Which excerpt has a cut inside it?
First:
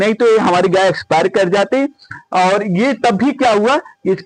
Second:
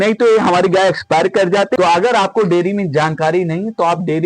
second; 1 cut; at 1.7 s

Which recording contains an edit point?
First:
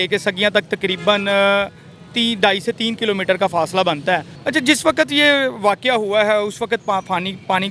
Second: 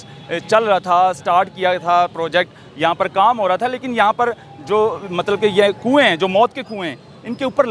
first; 1 cut; at 4.4 s

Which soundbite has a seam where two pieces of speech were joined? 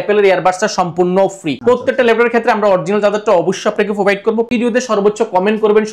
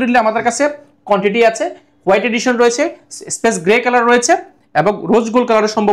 first; 2 cuts; at 1.5 s, 4.5 s

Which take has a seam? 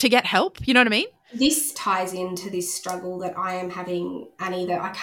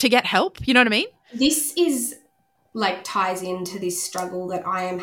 first; 1 cut; at 1.7 s

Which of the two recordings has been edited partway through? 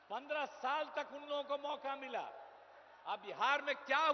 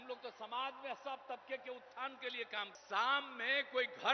second; 1 cut; at 2.7 s

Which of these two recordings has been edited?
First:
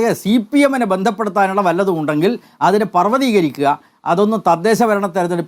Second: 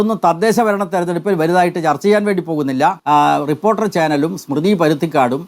second; 1 cut; at 3.0 s

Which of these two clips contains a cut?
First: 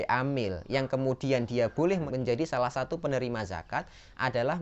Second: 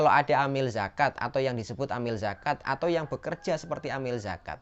first; 1 cut; at 2.0 s

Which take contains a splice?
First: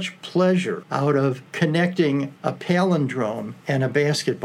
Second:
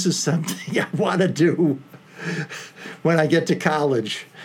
first; 3 cuts; at 1.1 s, 2.3 s, 3.5 s

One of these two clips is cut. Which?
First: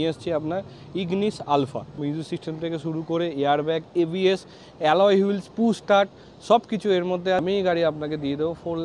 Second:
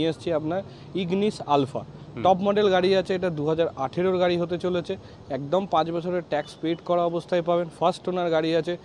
first; 2 cuts; at 1.9 s, 7.4 s

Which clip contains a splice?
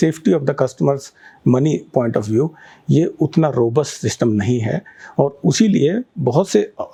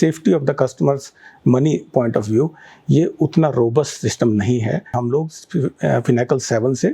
second; 1 cut; at 5.0 s

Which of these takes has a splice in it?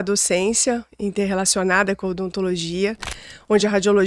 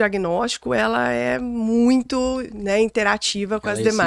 first; 1 cut; at 3.2 s

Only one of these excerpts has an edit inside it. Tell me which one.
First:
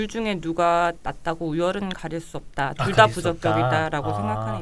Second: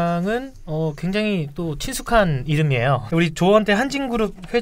second; 1 cut; at 3.0 s

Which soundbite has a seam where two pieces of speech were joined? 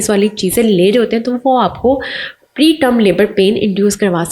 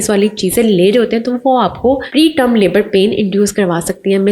second; 1 cut; at 2.1 s

